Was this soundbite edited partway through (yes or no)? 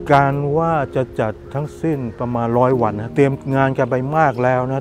yes